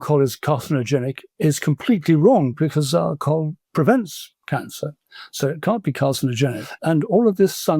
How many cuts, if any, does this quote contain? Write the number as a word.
three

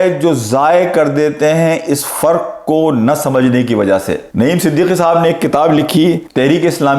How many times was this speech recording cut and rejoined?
zero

